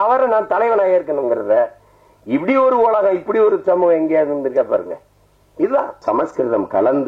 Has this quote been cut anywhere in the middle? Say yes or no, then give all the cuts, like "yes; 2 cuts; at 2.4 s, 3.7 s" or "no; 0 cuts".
yes; 1 cut; at 6.0 s